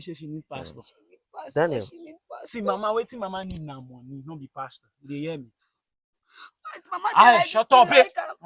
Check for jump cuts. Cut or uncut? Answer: uncut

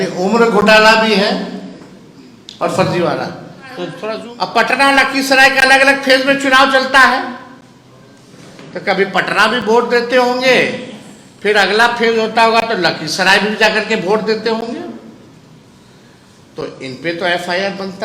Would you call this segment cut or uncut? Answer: cut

